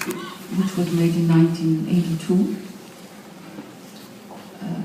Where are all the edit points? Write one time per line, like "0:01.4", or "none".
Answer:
0:02.2